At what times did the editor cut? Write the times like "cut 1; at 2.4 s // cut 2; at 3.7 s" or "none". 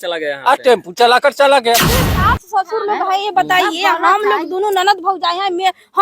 cut 1; at 2.0 s